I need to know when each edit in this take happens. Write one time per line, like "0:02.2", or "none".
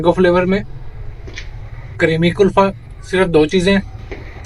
none